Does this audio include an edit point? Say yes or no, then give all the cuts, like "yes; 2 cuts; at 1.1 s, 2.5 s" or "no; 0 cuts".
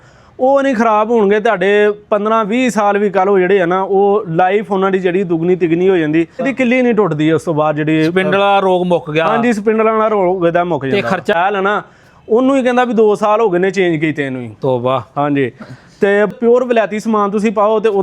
yes; 3 cuts; at 6.5 s, 11.4 s, 16.3 s